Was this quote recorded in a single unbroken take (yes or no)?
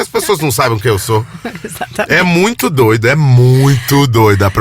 yes